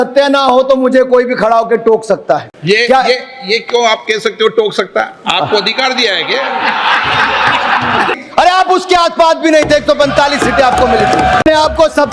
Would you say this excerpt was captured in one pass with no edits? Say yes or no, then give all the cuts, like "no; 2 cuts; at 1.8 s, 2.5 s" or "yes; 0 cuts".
no; 3 cuts; at 2.5 s, 8.1 s, 11.4 s